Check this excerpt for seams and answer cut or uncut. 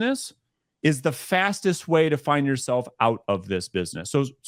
uncut